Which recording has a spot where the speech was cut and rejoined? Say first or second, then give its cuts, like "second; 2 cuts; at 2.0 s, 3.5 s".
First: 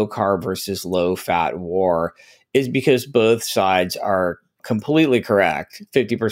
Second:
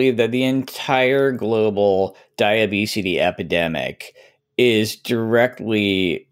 first; 1 cut; at 4.6 s